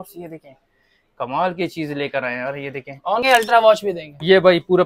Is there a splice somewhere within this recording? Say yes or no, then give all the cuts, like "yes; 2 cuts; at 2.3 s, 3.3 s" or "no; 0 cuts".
yes; 1 cut; at 3.2 s